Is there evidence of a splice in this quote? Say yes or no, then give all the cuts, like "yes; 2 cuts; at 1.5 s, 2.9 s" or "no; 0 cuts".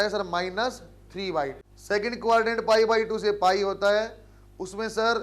yes; 1 cut; at 1.7 s